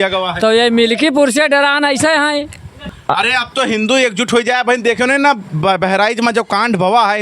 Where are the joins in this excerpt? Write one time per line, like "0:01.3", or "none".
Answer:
0:02.8